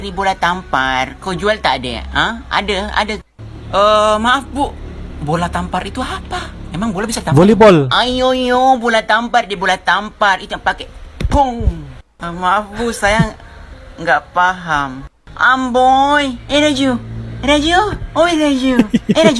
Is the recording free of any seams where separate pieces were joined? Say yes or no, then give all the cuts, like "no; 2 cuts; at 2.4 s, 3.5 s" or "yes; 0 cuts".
yes; 0 cuts